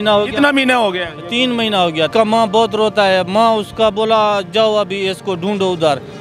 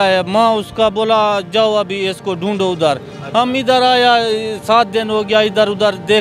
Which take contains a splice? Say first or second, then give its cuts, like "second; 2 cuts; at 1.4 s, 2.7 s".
first; 1 cut; at 2.1 s